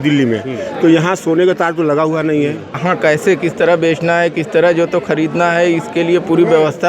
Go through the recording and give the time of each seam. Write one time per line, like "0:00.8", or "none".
0:02.7